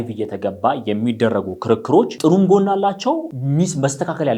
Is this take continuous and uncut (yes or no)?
no